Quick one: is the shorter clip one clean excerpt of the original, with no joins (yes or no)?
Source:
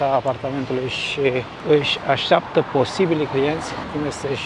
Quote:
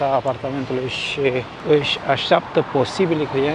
yes